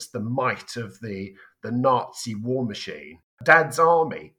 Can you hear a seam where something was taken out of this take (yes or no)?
yes